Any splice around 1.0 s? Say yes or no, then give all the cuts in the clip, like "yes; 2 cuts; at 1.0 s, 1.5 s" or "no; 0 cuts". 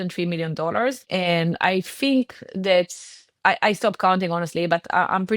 yes; 1 cut; at 1.0 s